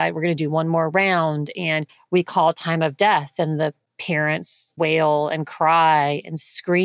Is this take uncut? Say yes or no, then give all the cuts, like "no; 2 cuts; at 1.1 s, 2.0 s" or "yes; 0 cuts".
yes; 0 cuts